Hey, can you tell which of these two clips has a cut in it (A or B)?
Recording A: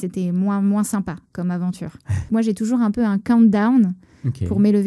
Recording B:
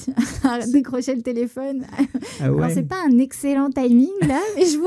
A